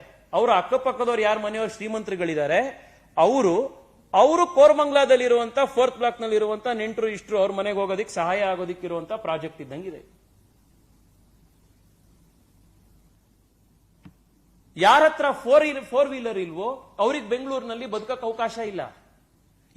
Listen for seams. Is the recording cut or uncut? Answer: cut